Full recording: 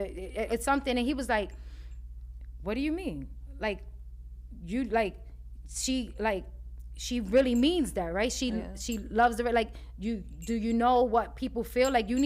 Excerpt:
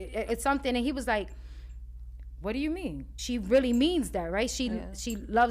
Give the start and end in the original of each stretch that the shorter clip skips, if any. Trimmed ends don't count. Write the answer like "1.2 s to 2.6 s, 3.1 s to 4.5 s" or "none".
3.3 s to 6.9 s